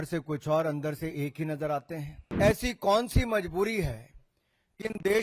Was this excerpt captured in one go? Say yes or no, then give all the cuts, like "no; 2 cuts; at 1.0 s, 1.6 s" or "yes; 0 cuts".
no; 1 cut; at 2.2 s